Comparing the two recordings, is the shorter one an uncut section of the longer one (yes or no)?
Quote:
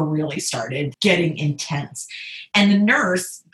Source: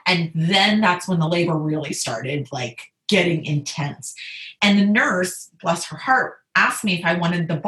no